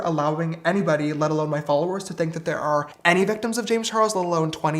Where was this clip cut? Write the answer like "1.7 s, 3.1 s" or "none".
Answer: none